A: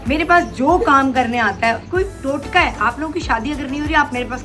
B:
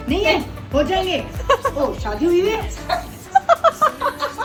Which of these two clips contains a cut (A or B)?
A